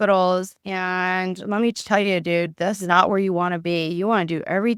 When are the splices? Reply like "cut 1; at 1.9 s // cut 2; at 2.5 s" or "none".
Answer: none